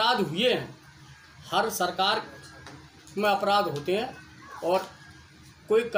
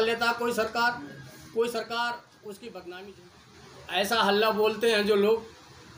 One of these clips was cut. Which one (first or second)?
second